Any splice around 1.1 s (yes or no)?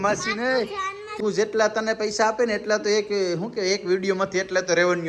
yes